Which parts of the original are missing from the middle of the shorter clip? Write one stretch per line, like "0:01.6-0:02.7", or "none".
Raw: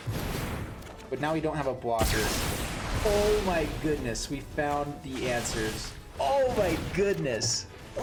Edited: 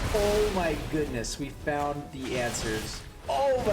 none